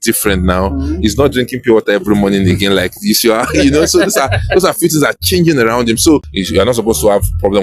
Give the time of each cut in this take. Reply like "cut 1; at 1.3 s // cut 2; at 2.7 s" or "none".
cut 1; at 6.3 s

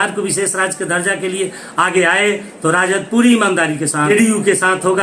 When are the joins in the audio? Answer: cut 1; at 4.1 s

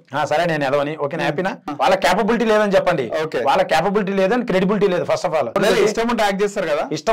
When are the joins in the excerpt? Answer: cut 1; at 1.7 s // cut 2; at 5.6 s

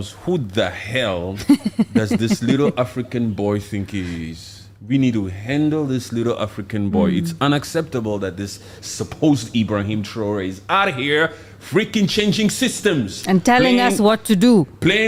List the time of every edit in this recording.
none

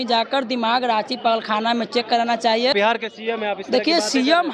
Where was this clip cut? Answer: cut 1; at 2.7 s

